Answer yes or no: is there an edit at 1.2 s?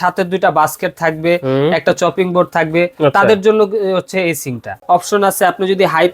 no